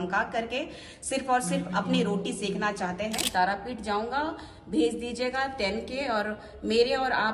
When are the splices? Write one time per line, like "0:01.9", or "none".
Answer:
0:03.2